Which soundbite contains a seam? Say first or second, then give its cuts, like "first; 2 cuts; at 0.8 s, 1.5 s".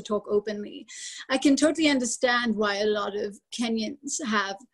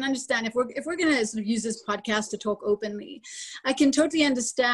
first; 1 cut; at 3.4 s